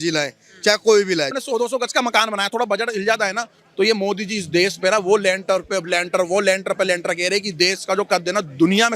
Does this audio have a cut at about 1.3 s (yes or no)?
yes